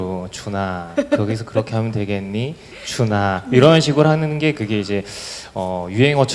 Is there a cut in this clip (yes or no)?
no